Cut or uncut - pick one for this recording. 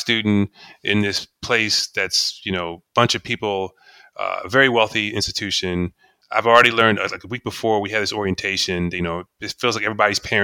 uncut